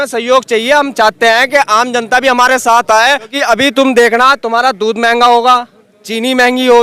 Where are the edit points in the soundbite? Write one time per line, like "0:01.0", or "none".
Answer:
0:03.3